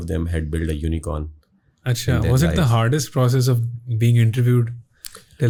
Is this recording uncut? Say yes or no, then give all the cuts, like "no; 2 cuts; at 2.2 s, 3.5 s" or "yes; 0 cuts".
yes; 0 cuts